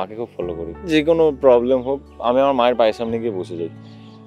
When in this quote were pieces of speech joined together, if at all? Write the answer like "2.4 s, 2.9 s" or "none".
0.9 s, 2.1 s